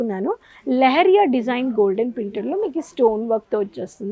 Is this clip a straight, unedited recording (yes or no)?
yes